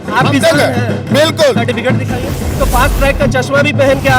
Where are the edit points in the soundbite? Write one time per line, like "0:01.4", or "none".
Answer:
0:02.5